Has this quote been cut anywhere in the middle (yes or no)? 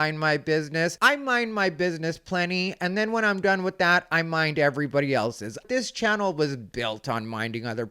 yes